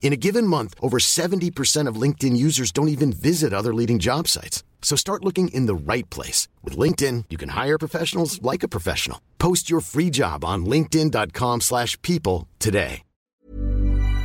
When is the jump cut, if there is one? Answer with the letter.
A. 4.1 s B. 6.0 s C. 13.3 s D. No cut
C